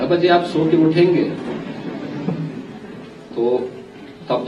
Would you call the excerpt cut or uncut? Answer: uncut